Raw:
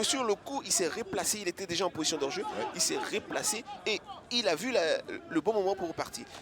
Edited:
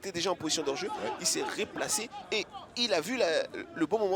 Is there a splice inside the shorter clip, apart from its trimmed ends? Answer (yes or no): no